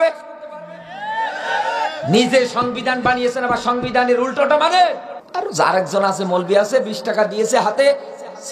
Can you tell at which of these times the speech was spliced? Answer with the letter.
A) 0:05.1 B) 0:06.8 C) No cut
A